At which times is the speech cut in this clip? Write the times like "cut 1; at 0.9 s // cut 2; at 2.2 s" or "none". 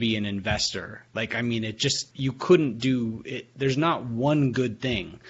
cut 1; at 2.1 s